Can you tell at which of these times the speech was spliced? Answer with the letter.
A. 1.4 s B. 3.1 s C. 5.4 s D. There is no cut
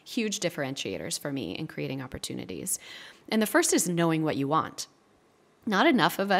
D